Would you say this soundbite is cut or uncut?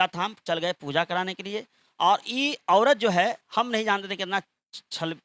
uncut